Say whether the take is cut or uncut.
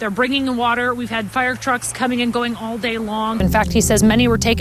cut